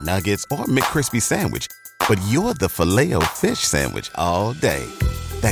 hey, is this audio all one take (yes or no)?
yes